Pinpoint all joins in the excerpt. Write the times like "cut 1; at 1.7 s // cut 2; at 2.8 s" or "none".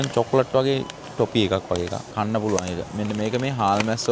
cut 1; at 2.0 s